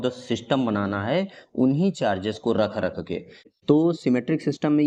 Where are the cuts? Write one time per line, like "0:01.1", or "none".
0:03.3